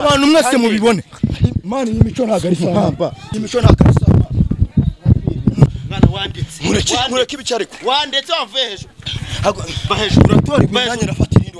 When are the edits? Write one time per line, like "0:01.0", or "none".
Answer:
0:03.2
0:05.7